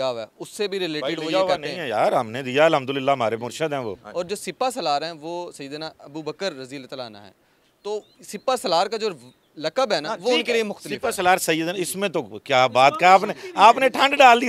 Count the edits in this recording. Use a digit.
1